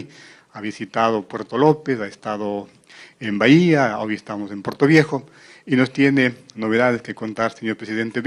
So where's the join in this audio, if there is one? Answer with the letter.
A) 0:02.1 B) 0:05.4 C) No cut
A